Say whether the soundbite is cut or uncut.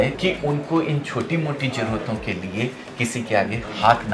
uncut